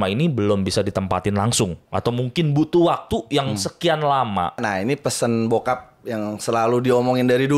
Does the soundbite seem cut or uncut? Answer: cut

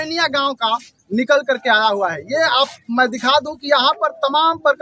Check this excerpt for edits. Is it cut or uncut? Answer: uncut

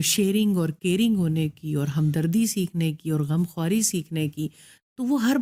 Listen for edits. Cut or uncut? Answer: uncut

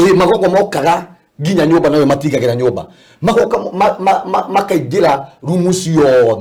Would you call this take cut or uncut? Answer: uncut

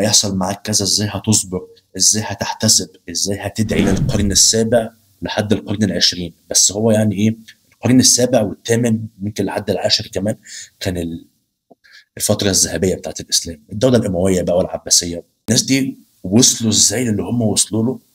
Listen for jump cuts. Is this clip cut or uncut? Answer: cut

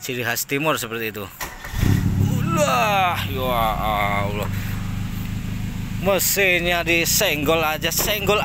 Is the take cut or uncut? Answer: uncut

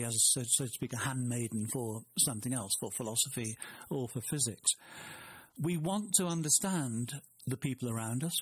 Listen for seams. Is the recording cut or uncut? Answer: uncut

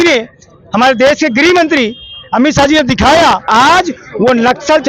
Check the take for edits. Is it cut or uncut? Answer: cut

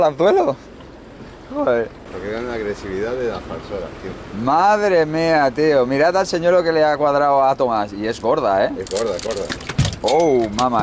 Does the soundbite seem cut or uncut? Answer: cut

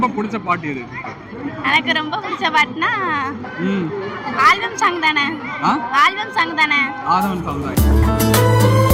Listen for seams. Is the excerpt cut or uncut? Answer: uncut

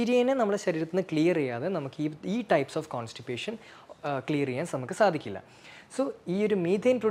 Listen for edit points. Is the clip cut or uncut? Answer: uncut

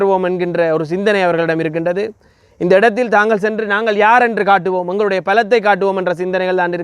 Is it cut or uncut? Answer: uncut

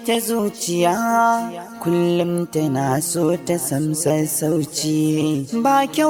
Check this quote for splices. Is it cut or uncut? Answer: uncut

